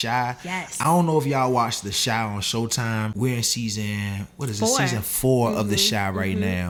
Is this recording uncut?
yes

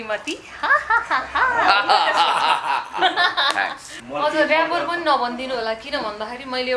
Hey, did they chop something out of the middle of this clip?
yes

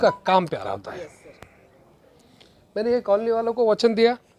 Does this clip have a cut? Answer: no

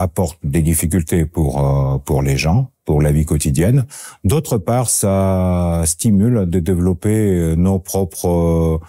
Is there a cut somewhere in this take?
no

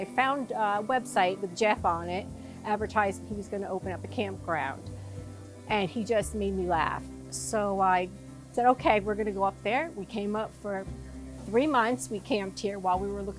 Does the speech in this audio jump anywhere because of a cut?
no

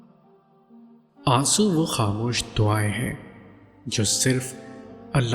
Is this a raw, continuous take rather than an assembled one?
no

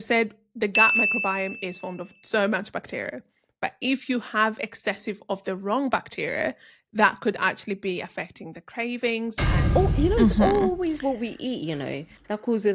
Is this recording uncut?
no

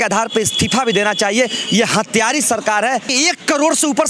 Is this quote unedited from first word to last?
no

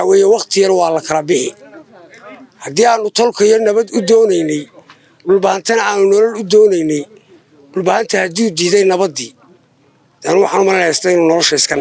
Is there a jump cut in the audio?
no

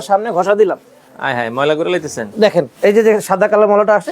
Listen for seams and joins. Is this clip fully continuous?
no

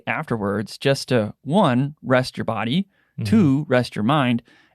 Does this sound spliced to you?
no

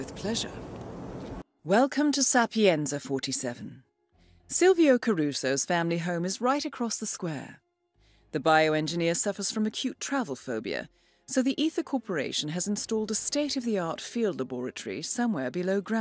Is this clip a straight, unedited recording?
no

